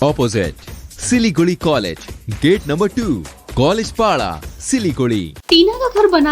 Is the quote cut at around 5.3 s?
yes; 1 cut; at 5.3 s

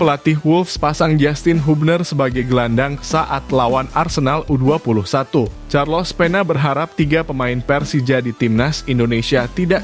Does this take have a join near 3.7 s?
no; 1 cut; at 5.6 s

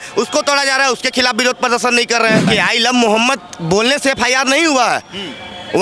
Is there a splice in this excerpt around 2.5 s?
yes; 1 cut; at 2.5 s

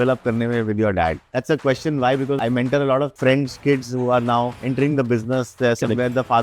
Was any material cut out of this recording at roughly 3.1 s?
yes; 4 cuts; at 1.3 s, 2.4 s, 3.1 s, 4.6 s

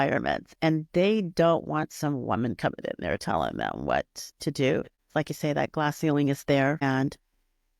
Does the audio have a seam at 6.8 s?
yes; 2 cuts; at 5.0 s, 6.8 s

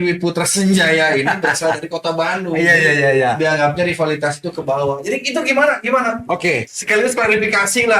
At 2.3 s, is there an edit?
no; 1 cut; at 6.7 s

